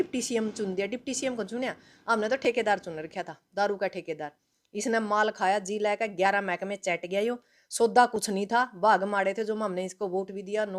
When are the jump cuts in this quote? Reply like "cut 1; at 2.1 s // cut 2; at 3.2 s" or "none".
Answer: none